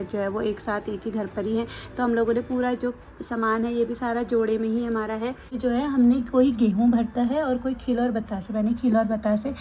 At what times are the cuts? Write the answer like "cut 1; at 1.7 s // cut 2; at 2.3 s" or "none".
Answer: cut 1; at 5.6 s

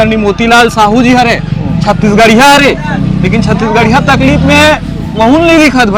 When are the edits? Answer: none

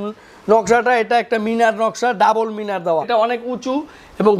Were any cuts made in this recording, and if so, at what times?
cut 1; at 3.1 s

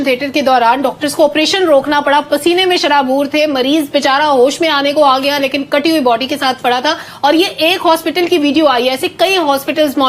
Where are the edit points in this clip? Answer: none

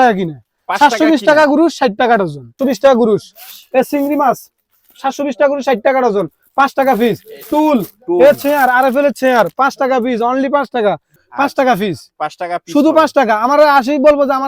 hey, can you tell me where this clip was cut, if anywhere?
cut 1; at 2.6 s // cut 2; at 11.1 s

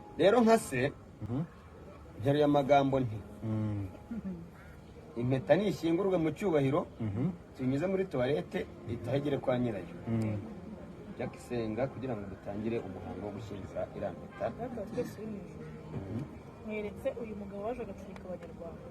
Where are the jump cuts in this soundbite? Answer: cut 1; at 1.1 s

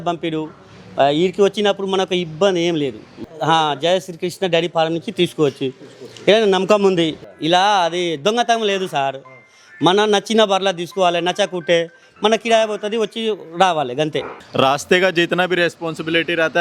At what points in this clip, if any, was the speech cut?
cut 1; at 3.1 s // cut 2; at 7.2 s // cut 3; at 14.4 s

